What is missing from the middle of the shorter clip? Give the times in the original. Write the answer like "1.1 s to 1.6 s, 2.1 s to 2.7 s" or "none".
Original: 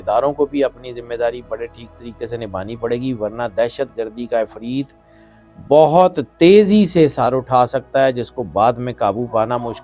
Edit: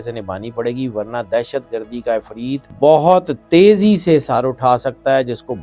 4.9 s to 5.6 s

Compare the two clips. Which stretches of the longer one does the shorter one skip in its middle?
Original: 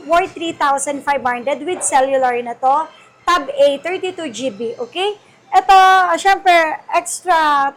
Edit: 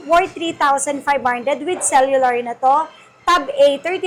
none

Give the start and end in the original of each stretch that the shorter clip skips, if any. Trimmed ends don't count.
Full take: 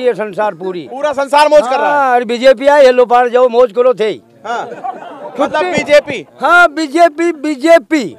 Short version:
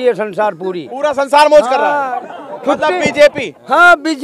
2.0 s to 4.7 s

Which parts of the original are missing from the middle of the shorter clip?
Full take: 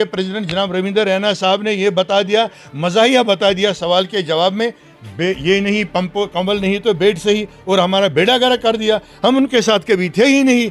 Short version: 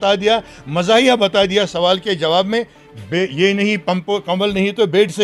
none

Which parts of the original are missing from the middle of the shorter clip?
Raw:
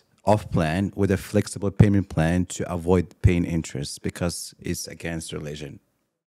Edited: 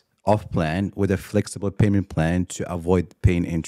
none

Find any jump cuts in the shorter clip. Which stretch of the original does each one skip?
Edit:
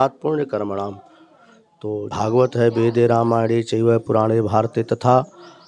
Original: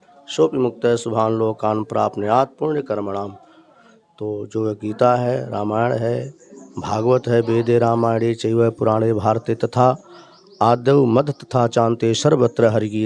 4.4 s to 6.8 s

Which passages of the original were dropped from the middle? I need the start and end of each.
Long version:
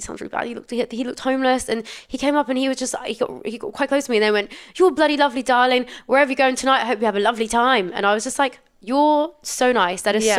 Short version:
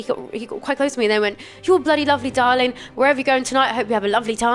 none

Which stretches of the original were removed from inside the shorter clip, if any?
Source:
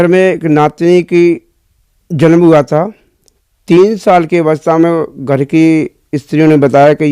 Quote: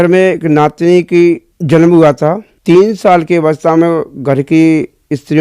1.5 s to 2.0 s, 3.0 s to 3.5 s

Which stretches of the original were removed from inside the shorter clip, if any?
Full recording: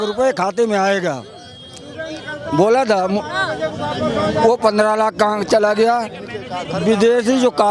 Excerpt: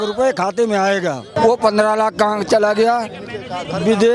1.3 s to 4.3 s

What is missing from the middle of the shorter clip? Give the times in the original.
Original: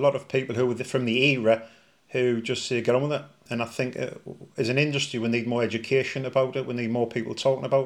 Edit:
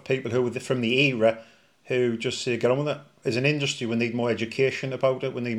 3.3 s to 4.4 s

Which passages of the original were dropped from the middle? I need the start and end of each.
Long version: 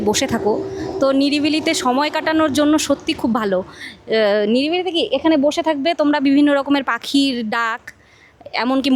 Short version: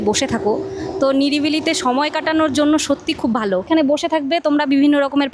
3.7 s to 5.2 s

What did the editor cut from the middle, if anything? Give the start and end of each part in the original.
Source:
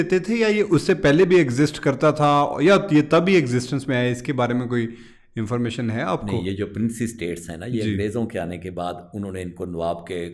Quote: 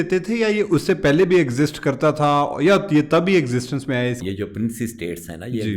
4.2 s to 6.4 s

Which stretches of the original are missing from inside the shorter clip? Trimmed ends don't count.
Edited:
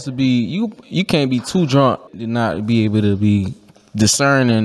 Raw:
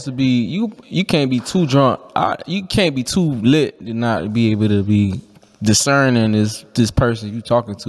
2.1 s to 3.8 s

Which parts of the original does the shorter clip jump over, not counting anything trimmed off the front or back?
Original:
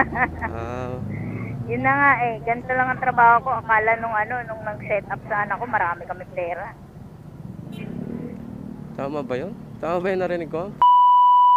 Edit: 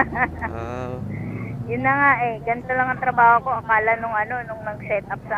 none

